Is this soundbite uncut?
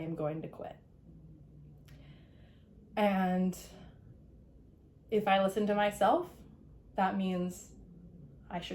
yes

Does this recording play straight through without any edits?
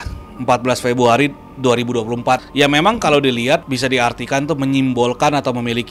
no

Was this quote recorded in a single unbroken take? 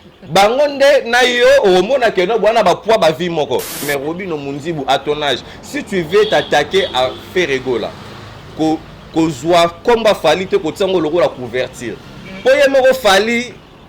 no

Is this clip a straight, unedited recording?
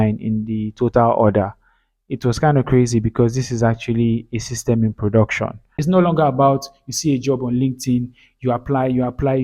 no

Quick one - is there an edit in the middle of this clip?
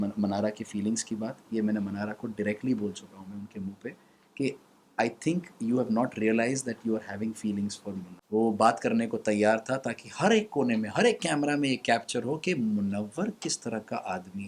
yes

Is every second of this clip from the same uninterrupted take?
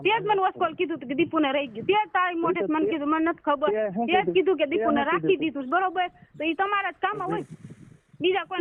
yes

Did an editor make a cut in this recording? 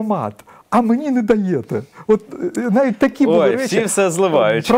no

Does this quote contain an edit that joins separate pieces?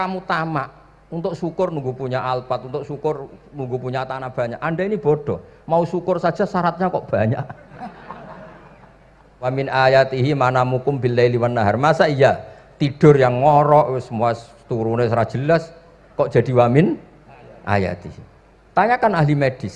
yes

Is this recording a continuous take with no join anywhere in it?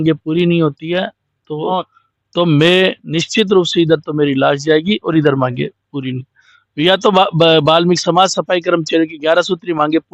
yes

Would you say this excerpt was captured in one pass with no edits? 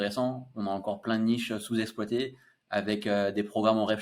yes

